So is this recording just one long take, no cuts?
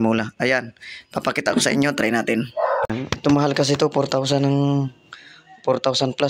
no; 1 cut; at 2.9 s

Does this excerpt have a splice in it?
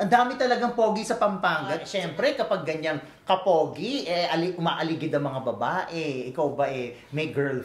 yes; 1 cut; at 1.9 s

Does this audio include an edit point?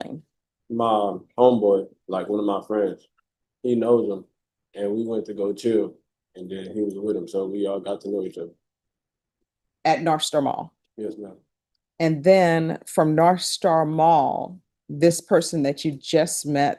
no; 0 cuts

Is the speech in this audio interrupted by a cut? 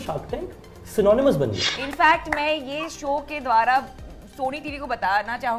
yes; 1 cut; at 1.7 s

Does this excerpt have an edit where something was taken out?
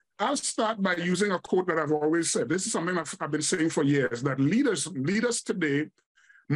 no; 0 cuts

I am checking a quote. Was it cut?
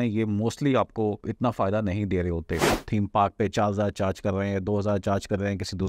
yes; 2 cuts; at 1.3 s, 2.8 s

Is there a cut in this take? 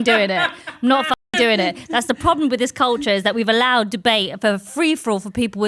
no; 0 cuts

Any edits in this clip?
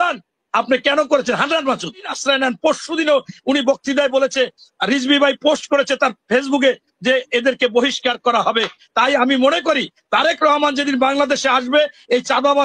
yes; 1 cut; at 2.1 s

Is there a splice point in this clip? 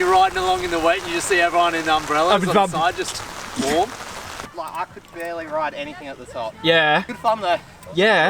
yes; 2 cuts; at 4.5 s, 7.1 s

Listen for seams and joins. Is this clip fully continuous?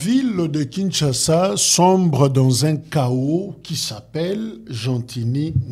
yes; 0 cuts

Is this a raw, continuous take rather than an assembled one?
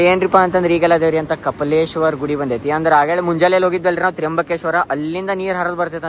yes; 0 cuts

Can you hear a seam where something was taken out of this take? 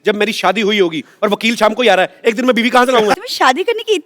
yes; 1 cut; at 3.2 s

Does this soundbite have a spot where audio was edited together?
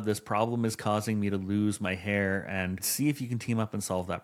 yes; 1 cut; at 2.9 s

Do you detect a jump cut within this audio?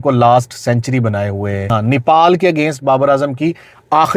yes; 1 cut; at 1.7 s

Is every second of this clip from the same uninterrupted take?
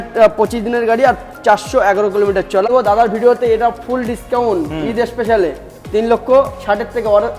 no; 1 cut; at 2.6 s

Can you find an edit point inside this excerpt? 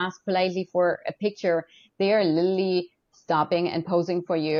no; 0 cuts

